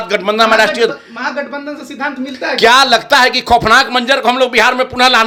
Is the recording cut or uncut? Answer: uncut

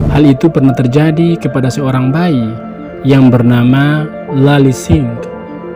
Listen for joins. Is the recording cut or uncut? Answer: uncut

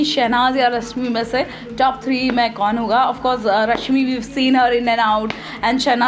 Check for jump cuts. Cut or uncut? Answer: uncut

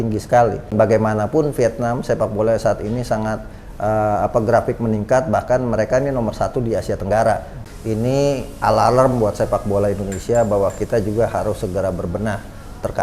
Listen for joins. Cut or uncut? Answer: cut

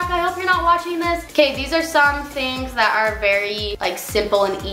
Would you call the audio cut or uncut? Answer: cut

